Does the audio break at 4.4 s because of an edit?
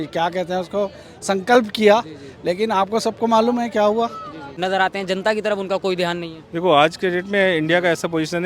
yes; 1 cut; at 4.4 s

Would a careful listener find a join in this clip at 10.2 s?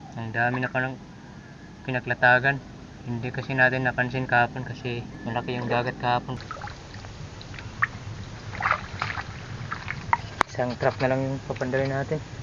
yes; 3 cuts; at 5.1 s, 6.4 s, 10.2 s

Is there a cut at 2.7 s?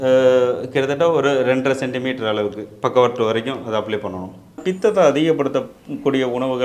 no; 1 cut; at 4.6 s

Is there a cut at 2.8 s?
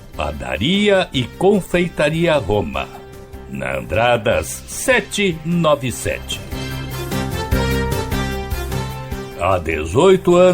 no; 3 cuts; at 6.6 s, 7.6 s, 9.2 s

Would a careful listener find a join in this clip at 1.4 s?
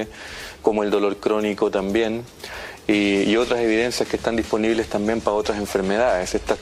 no; 1 cut; at 5.0 s

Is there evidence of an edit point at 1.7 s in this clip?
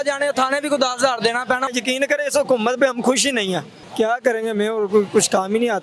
yes; 2 cuts; at 1.7 s, 3.8 s

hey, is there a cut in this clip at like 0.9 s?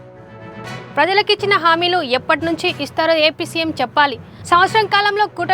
yes; 1 cut; at 0.9 s

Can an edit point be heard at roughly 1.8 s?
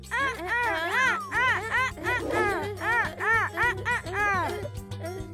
no; 0 cuts

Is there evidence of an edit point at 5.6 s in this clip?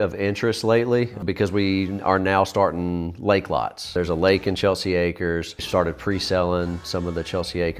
yes; 3 cuts; at 1.2 s, 3.9 s, 5.6 s

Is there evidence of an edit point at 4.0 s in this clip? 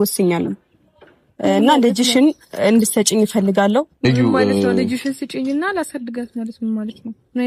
yes; 1 cut; at 4.0 s

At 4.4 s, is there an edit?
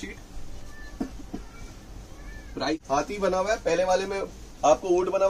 no; 1 cut; at 2.7 s

